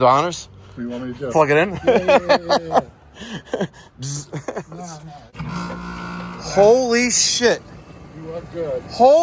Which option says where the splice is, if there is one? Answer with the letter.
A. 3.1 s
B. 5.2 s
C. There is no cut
B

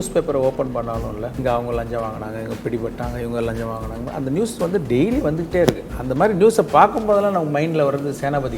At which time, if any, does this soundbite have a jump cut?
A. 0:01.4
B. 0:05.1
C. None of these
A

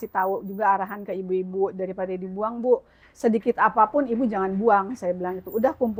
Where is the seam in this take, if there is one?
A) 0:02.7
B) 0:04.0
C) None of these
C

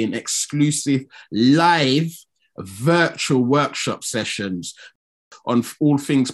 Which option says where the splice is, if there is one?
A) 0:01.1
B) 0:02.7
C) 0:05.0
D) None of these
C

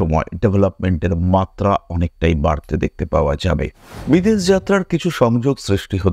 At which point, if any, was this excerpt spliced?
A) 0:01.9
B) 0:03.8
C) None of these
B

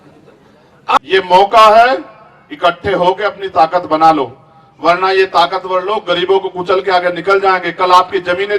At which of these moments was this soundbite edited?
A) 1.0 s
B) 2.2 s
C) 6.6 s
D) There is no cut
A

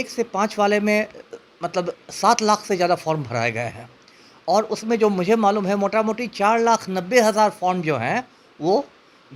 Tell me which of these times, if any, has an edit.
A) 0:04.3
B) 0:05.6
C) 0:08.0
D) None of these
D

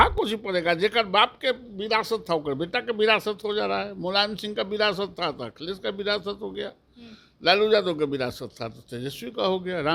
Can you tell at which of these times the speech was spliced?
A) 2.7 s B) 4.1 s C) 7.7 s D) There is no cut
D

